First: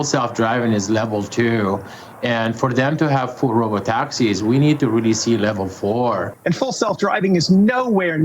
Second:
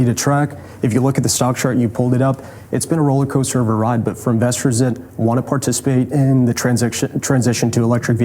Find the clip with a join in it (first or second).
first